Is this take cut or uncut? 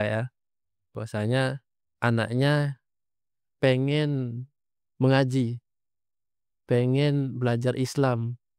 uncut